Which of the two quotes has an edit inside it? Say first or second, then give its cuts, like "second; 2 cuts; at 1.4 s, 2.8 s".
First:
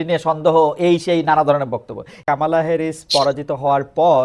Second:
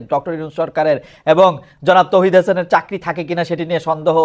first; 1 cut; at 2.1 s